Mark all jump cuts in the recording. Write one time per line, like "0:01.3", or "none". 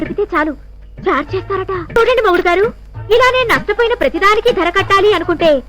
0:02.0